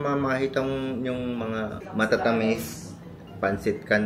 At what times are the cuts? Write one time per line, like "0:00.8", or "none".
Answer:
none